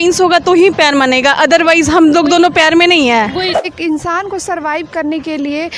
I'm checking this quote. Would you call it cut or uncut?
cut